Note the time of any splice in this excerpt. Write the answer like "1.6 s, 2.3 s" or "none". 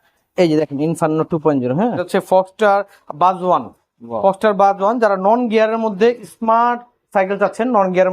2.0 s

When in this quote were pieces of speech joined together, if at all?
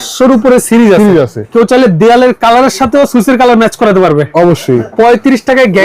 1.4 s, 4.9 s

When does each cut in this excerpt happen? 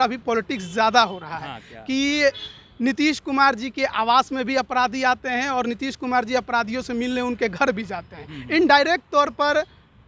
none

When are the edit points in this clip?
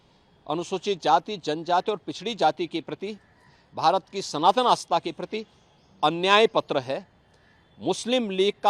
none

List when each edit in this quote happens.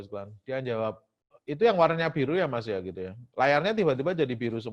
none

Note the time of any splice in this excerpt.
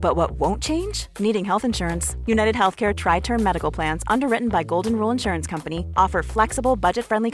none

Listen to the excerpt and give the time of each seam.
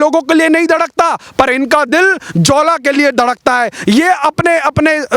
none

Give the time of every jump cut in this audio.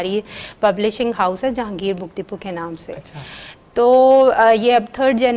none

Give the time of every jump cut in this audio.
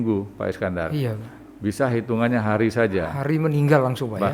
none

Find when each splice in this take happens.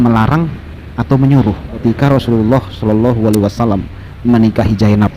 1.7 s

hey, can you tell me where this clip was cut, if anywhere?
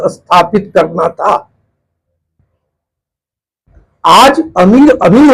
none

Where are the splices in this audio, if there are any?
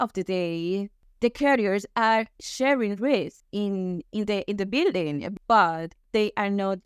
1.0 s, 3.4 s, 5.3 s

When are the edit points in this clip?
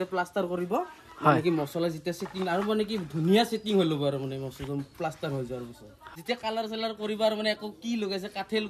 6.1 s

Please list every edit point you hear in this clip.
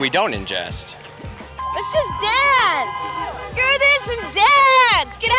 1.6 s

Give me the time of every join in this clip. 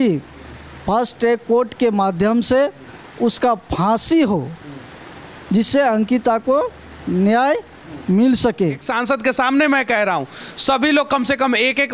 8.9 s

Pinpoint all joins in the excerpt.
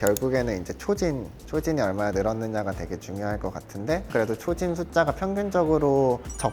1.3 s, 4.1 s

